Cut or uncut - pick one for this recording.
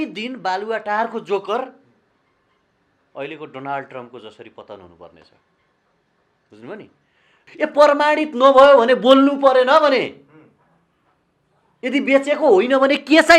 cut